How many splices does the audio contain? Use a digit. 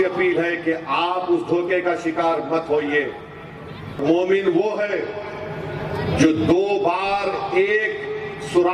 1